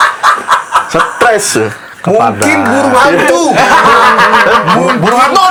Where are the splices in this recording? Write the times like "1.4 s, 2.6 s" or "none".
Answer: none